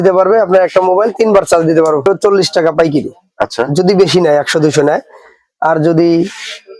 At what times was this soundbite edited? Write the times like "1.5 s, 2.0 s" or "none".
2.0 s